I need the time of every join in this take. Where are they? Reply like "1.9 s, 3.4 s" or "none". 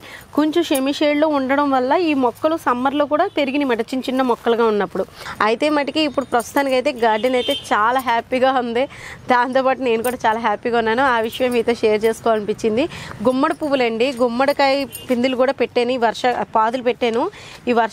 5.2 s

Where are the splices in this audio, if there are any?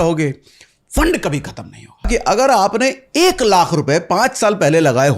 2.1 s

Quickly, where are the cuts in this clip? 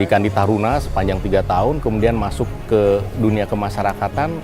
2.5 s

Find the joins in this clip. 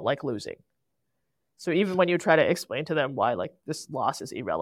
none

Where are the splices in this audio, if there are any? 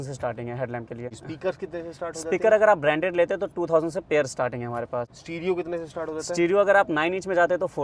1.1 s, 5.2 s

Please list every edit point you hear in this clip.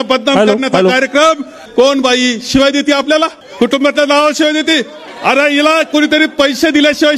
1.6 s, 3.4 s, 5.0 s

